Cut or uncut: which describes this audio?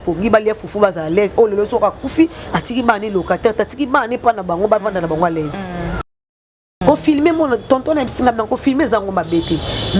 cut